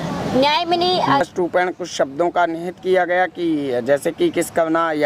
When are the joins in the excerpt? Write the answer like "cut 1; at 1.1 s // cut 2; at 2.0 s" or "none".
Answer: cut 1; at 1.2 s